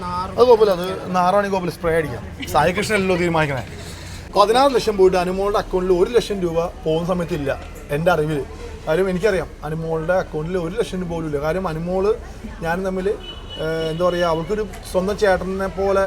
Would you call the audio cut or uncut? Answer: cut